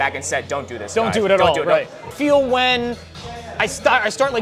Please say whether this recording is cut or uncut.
cut